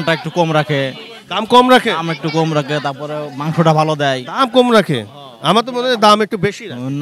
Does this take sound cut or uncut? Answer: uncut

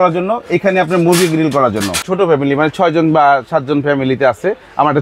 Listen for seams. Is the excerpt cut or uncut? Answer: cut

